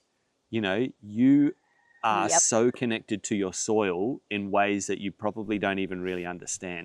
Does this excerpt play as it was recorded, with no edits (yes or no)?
yes